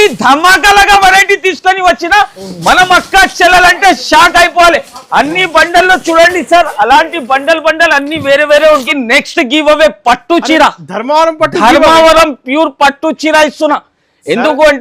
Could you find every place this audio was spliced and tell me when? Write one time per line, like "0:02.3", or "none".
0:08.9

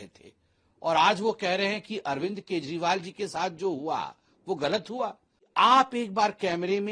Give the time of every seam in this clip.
0:05.3

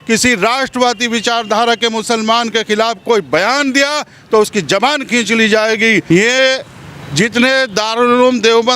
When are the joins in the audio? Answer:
0:06.0

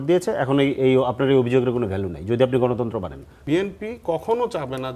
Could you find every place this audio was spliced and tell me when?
0:03.3

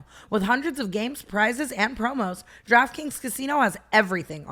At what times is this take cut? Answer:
none

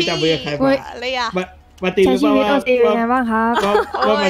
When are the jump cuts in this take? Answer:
none

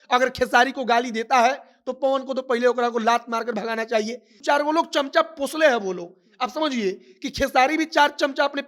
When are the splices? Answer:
0:04.3

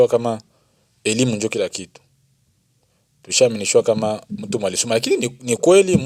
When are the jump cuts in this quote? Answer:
none

